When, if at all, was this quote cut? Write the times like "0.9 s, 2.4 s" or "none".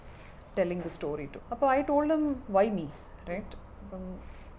1.3 s